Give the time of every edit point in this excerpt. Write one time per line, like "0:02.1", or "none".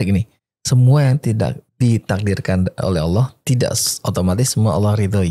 none